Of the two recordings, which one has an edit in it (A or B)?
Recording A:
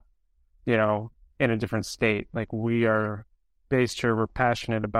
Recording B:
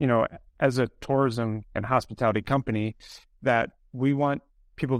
B